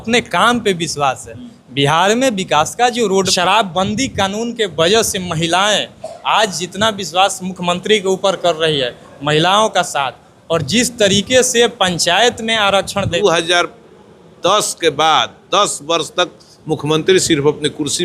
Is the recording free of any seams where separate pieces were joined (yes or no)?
no